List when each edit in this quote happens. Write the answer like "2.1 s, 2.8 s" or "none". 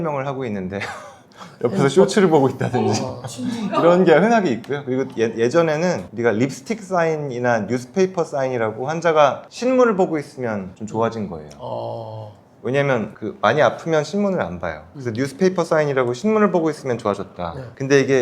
none